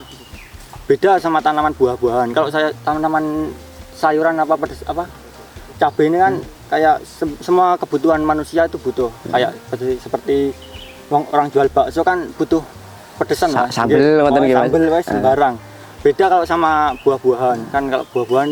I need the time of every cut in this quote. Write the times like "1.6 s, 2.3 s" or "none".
none